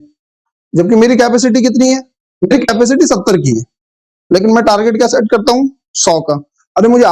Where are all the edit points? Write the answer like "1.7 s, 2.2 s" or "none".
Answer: none